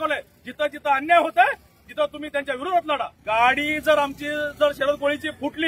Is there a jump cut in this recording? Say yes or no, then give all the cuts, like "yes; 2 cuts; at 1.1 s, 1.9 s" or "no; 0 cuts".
yes; 1 cut; at 3.2 s